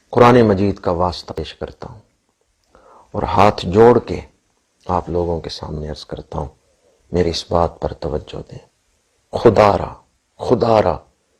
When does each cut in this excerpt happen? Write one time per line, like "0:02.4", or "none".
0:01.3